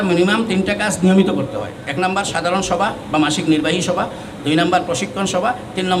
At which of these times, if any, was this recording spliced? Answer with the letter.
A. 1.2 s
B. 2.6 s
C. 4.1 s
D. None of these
D